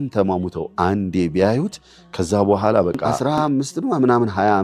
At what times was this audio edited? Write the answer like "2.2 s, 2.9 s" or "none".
3.1 s